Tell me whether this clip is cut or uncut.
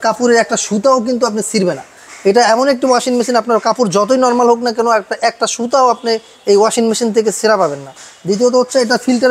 uncut